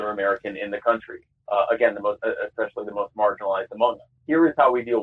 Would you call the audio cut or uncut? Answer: cut